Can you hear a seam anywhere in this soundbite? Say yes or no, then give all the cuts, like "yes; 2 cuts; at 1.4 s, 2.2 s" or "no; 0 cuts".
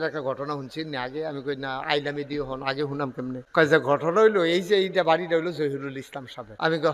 no; 0 cuts